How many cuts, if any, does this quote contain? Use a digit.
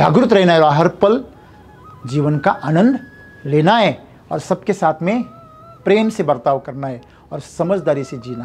0